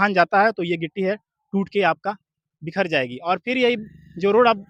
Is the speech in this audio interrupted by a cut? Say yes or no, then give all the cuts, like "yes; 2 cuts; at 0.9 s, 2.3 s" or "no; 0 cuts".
no; 0 cuts